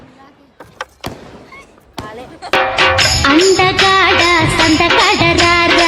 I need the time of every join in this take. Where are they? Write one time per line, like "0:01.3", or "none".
none